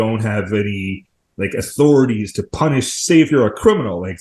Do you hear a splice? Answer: no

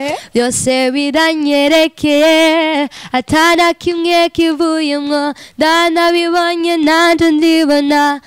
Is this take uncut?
yes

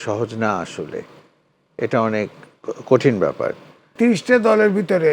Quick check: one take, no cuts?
no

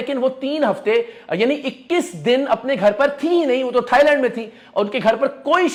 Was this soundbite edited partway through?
no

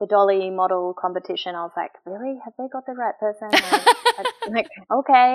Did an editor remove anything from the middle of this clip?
no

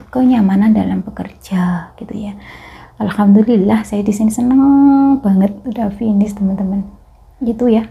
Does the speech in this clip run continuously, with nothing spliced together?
yes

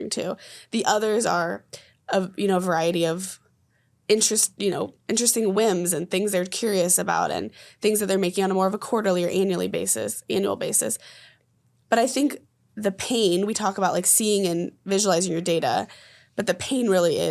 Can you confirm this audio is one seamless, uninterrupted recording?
yes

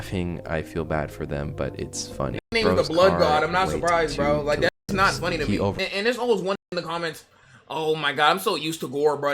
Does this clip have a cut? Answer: yes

